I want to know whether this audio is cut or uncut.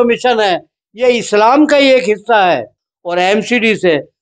cut